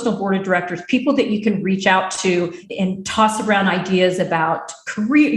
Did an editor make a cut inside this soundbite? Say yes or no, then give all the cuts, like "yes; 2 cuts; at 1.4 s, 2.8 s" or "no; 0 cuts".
yes; 1 cut; at 2.6 s